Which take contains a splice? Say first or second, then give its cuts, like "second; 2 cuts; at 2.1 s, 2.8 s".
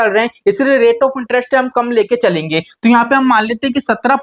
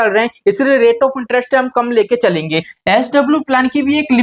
second; 1 cut; at 2.7 s